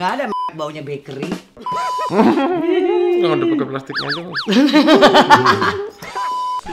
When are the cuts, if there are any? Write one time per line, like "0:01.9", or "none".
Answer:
0:02.1